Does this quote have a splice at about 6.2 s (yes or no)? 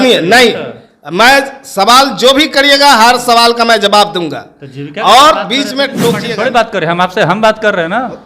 yes